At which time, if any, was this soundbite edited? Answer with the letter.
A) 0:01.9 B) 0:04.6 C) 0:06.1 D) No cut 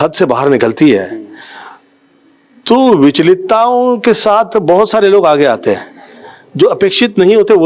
D